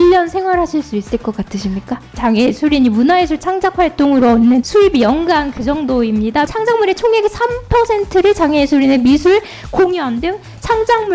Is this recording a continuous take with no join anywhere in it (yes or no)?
no